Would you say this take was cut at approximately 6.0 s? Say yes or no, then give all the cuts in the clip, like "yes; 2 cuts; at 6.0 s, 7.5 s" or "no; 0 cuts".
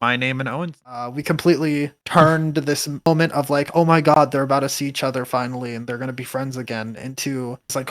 no; 1 cut; at 1.1 s